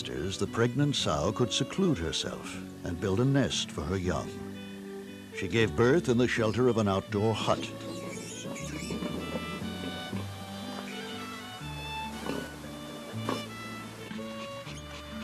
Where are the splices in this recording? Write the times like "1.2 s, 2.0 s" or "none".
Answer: 1.8 s